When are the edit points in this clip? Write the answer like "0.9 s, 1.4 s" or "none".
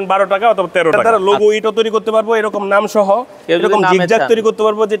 1.0 s